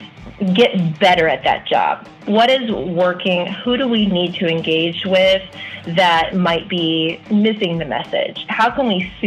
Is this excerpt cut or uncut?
cut